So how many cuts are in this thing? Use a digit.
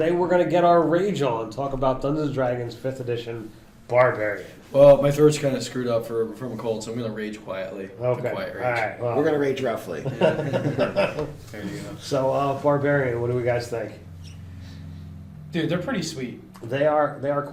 0